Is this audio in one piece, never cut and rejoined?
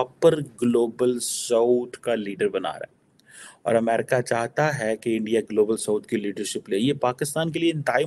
yes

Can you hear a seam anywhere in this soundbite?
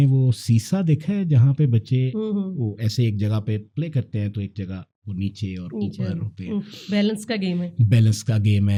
no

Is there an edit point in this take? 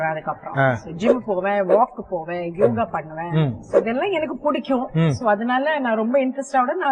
no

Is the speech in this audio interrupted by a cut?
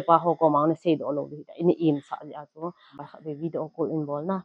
yes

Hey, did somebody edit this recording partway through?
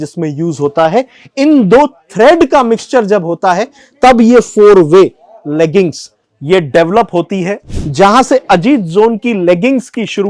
yes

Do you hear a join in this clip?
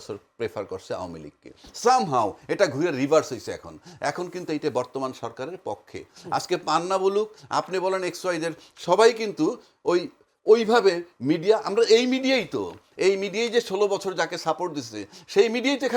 no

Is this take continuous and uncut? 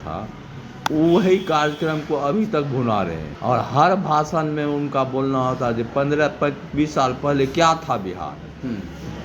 no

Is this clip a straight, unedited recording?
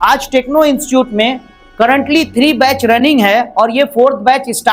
yes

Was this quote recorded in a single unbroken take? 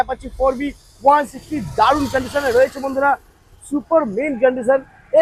yes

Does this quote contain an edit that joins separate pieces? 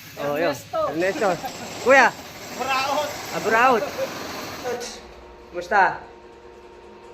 yes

